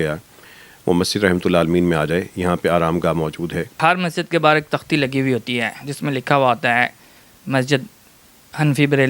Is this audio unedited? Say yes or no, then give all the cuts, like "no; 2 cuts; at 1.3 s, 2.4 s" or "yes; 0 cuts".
no; 1 cut; at 3.8 s